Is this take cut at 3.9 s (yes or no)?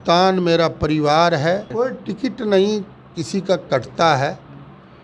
no